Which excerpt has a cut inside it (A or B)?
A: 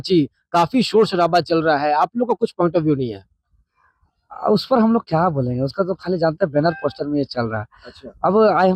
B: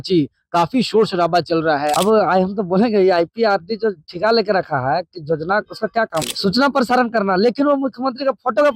B